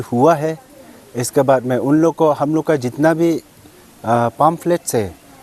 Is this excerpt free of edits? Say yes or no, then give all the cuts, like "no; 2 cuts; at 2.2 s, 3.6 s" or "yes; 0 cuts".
yes; 0 cuts